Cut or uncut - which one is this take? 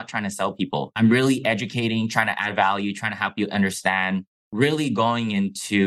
cut